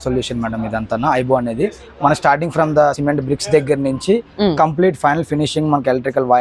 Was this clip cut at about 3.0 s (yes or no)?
yes